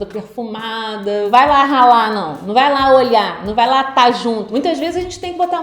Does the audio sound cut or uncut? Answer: cut